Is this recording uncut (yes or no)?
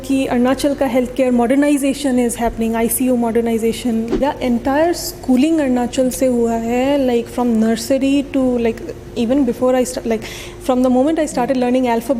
no